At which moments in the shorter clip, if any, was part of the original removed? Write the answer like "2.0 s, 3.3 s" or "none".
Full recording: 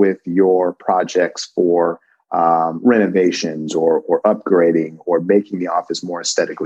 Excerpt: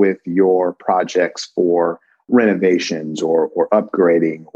2.2 s